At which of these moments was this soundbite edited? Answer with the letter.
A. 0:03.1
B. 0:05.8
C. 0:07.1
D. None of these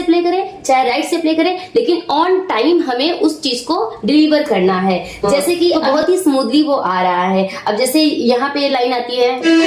B